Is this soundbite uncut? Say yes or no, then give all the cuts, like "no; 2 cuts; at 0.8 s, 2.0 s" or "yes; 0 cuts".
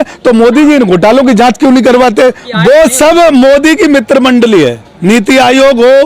no; 1 cut; at 2.4 s